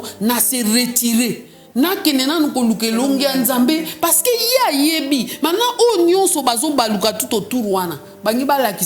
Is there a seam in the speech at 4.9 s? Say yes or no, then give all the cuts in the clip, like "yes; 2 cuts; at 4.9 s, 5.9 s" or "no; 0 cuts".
no; 0 cuts